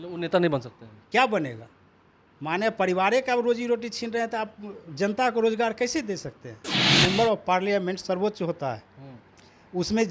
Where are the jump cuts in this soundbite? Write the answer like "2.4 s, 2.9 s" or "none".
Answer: 6.9 s